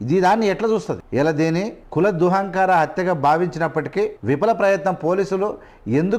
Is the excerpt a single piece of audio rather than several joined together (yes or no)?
no